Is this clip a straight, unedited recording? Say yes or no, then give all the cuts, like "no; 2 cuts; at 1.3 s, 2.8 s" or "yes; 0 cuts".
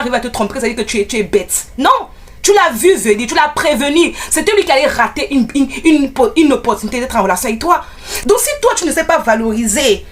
no; 1 cut; at 8.2 s